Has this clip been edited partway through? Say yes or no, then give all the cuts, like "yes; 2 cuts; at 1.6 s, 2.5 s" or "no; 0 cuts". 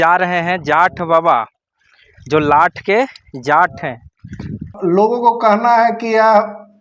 yes; 1 cut; at 4.7 s